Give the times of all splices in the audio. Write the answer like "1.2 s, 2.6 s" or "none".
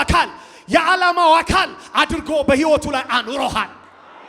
none